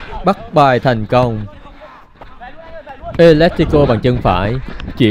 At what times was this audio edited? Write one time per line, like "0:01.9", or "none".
0:02.1

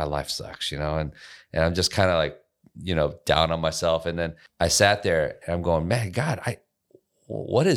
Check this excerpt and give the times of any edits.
0:04.4

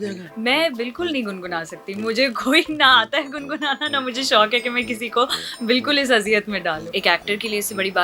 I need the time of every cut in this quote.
0:06.8

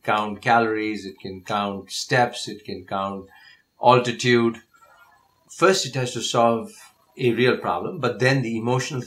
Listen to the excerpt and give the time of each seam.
0:05.4

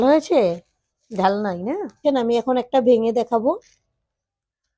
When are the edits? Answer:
0:02.0

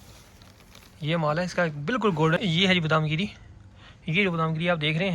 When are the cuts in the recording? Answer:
0:02.4

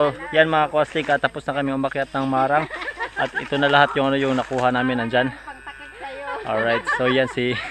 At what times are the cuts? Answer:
none

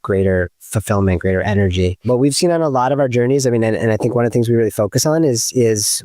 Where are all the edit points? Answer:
0:02.1

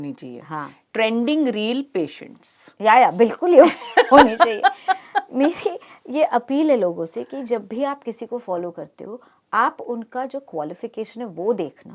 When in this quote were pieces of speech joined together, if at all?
none

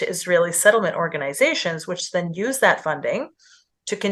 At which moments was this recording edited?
none

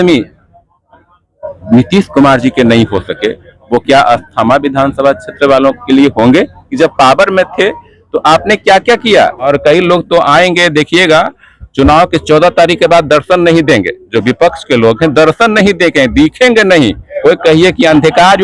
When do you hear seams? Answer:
0:06.6
0:09.5
0:17.1

